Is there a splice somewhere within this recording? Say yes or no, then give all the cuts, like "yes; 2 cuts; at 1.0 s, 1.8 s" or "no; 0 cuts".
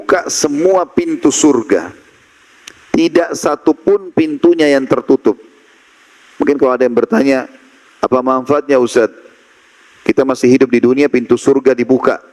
no; 0 cuts